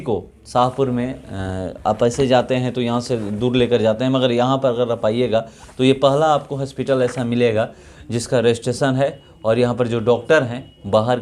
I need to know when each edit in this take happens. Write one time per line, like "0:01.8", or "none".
none